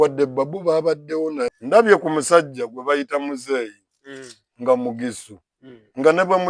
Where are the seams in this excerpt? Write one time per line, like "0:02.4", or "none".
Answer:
0:01.5